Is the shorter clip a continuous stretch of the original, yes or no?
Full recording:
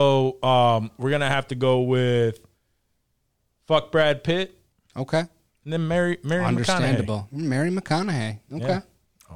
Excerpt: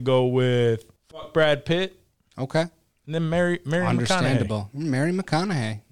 no